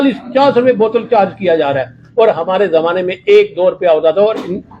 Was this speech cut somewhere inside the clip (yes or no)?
no